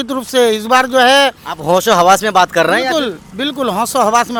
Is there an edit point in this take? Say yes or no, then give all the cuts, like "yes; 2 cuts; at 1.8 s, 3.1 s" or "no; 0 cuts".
no; 0 cuts